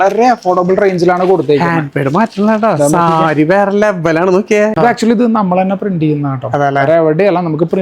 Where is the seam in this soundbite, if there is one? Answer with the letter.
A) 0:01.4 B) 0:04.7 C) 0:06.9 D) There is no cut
B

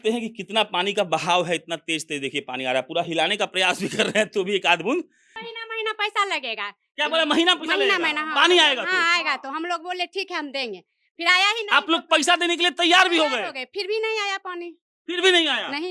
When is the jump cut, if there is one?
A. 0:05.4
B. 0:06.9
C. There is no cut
A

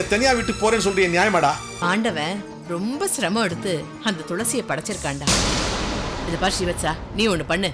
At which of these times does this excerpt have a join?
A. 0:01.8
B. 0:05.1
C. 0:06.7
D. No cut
A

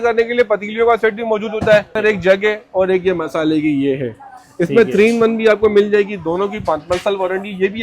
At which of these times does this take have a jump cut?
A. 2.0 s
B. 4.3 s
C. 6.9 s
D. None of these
A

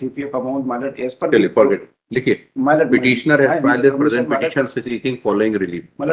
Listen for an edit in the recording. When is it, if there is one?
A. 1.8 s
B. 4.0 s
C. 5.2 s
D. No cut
D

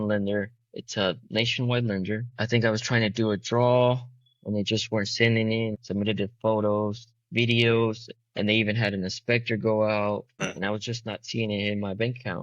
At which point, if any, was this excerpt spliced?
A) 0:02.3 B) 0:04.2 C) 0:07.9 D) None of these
A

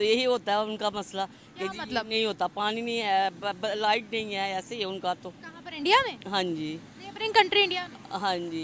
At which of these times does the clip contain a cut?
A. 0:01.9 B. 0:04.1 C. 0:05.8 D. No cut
D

